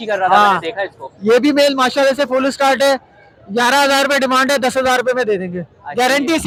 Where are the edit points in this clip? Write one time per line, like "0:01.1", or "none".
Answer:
none